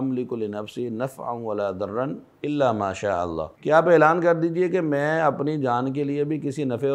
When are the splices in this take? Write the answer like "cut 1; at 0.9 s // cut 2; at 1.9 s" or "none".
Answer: cut 1; at 3.5 s